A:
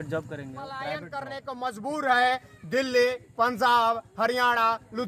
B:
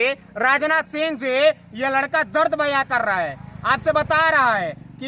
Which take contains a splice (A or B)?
A